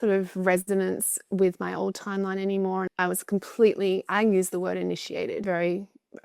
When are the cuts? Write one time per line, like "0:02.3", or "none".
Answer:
0:02.9
0:05.4